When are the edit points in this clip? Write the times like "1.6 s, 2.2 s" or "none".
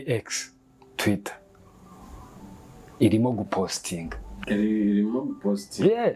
none